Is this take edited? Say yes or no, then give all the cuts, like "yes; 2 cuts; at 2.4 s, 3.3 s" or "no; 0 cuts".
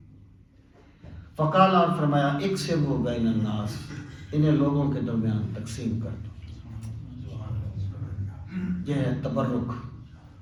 no; 0 cuts